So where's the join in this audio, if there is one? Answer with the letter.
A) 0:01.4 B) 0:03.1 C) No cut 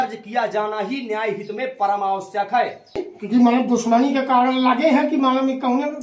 B